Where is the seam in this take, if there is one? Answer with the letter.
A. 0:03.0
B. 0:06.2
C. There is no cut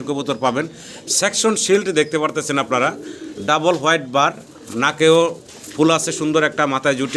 C